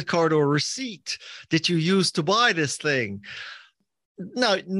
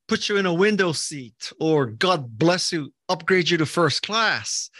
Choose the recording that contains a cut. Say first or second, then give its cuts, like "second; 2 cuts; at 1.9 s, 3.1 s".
first; 1 cut; at 3.8 s